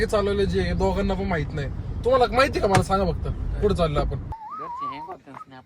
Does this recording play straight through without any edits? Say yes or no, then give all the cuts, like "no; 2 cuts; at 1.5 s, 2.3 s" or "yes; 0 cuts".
no; 1 cut; at 4.4 s